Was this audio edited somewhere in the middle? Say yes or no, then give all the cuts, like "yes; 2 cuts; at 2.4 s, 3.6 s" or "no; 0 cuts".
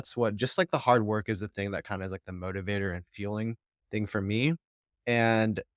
no; 0 cuts